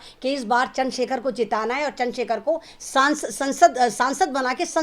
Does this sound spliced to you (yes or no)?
no